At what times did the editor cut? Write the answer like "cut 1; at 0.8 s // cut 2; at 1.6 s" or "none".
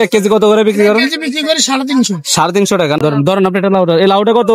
cut 1; at 3.0 s